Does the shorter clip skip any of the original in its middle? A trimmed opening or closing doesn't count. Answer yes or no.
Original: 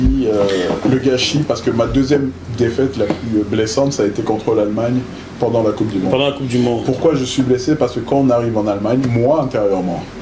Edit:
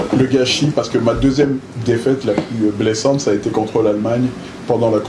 no